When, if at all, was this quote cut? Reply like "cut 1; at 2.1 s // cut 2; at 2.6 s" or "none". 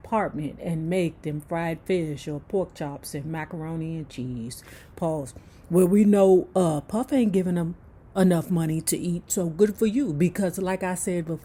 none